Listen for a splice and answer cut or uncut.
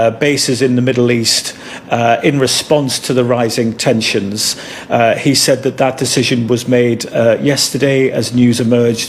uncut